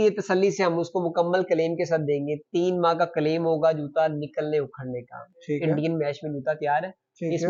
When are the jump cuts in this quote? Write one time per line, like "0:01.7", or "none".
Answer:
none